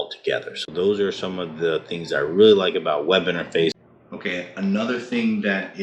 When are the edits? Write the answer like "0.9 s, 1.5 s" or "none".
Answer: 3.7 s